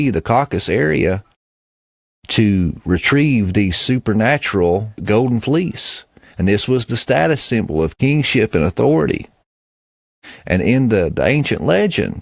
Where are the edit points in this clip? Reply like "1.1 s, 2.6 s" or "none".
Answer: 4.9 s